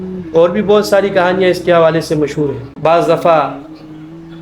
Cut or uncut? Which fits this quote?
cut